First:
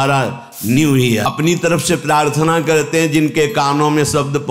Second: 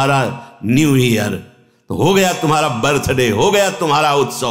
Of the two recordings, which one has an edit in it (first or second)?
first